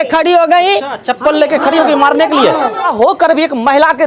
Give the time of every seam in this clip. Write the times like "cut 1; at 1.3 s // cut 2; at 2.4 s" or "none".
cut 1; at 2.9 s